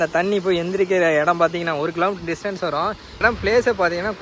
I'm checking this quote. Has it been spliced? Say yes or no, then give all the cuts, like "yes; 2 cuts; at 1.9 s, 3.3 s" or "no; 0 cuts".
yes; 1 cut; at 3.2 s